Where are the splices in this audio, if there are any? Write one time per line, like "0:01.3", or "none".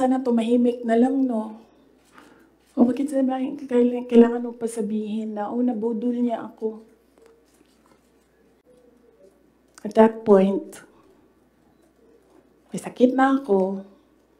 0:08.6